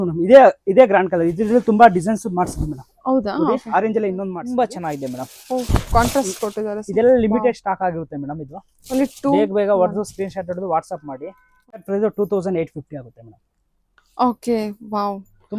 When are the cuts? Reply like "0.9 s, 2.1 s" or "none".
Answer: 4.3 s, 11.8 s